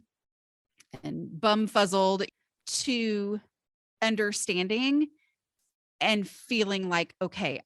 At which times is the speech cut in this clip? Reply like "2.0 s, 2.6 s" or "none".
2.3 s